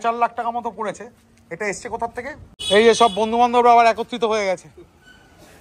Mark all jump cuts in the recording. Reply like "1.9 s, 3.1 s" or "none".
2.6 s

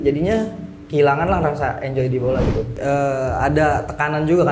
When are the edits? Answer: 2.8 s

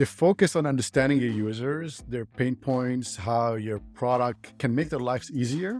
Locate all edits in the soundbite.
4.5 s

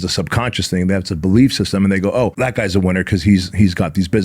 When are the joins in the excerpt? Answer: 2.3 s

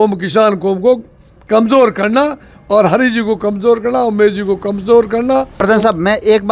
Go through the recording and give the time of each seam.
5.6 s

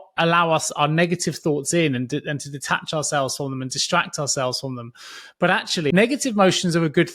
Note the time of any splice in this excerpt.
5.9 s

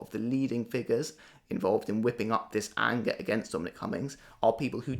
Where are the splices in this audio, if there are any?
1.2 s

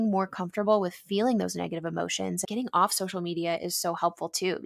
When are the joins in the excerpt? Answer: 2.5 s

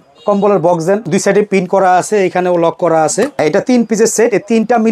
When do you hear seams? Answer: 1.0 s, 3.4 s

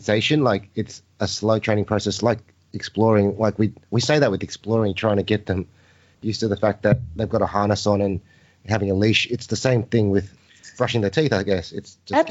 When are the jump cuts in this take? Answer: 10.4 s

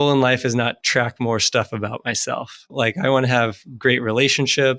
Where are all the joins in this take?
2.7 s

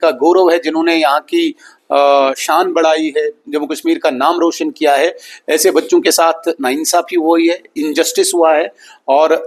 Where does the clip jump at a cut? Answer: none

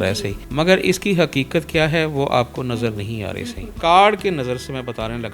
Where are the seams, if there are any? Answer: 3.6 s

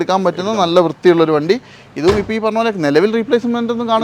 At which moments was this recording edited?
none

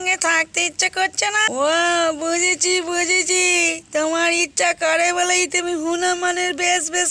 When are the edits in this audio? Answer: 1.5 s

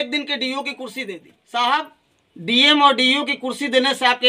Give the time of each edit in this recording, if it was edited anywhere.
1.3 s

